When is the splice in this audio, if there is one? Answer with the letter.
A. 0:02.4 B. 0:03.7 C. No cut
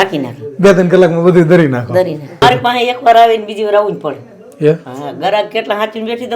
A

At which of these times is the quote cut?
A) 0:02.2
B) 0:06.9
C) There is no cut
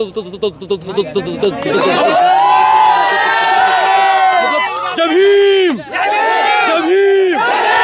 C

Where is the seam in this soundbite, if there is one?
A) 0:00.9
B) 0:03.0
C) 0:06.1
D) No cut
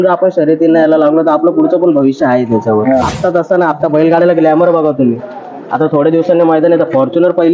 B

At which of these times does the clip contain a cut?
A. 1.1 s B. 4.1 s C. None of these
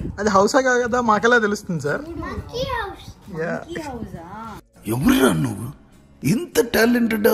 C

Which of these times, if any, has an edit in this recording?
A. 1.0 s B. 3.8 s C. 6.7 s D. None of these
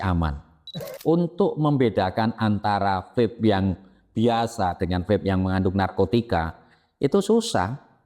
A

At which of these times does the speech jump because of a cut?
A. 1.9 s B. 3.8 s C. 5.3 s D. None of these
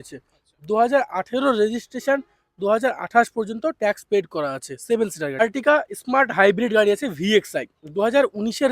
C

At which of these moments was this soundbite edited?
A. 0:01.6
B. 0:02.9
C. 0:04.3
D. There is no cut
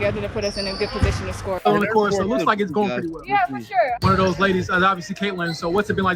A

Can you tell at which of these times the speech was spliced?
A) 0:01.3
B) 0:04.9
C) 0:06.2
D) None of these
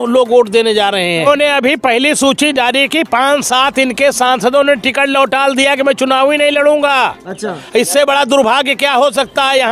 A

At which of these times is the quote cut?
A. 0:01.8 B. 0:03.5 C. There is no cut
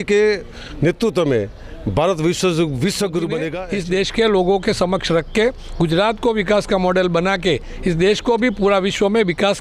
B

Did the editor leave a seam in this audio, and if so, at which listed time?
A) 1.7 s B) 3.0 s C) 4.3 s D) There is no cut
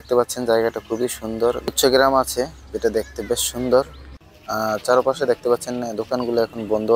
A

